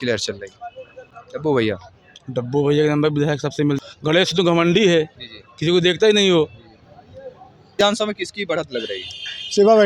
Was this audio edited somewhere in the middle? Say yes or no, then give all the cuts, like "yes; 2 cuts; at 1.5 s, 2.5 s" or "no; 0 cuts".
yes; 2 cuts; at 3.8 s, 7.8 s